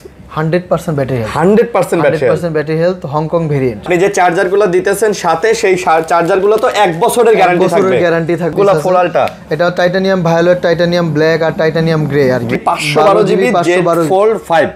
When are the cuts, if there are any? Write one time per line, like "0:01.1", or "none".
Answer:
0:03.9
0:08.5
0:12.6